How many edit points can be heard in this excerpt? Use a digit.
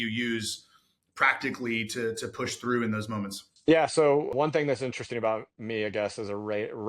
2